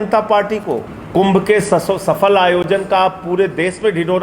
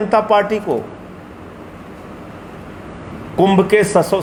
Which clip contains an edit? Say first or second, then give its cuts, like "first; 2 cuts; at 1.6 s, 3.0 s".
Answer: first; 1 cut; at 0.9 s